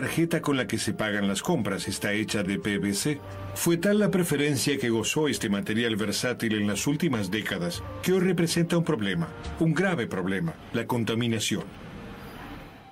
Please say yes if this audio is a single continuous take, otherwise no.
no